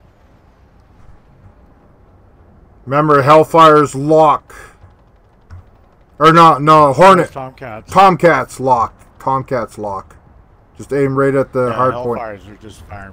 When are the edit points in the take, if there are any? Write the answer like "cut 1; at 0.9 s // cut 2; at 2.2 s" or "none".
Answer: none